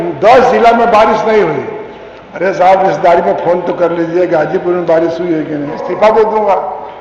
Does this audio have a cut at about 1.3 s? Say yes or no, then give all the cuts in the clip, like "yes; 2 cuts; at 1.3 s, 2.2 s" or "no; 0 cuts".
no; 1 cut; at 5.9 s